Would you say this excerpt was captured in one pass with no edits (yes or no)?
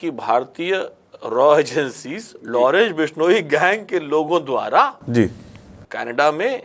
yes